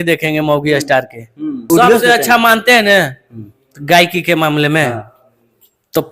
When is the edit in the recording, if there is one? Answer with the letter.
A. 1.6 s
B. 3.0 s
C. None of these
A